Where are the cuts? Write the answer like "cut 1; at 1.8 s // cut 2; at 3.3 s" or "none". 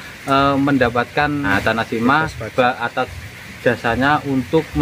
cut 1; at 1.5 s